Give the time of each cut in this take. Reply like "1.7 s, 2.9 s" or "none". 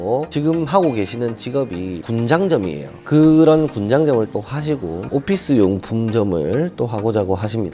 3.0 s